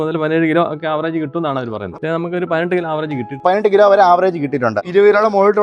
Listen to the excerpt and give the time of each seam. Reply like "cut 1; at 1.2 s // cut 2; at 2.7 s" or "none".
cut 1; at 1.9 s // cut 2; at 3.4 s // cut 3; at 4.8 s